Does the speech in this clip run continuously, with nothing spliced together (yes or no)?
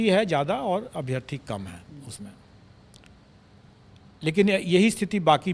yes